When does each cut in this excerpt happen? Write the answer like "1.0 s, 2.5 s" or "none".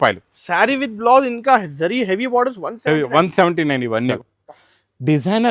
4.1 s